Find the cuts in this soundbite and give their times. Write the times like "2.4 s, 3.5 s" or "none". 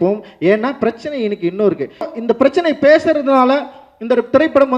2.1 s